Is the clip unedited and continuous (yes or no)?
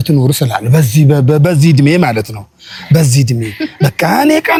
yes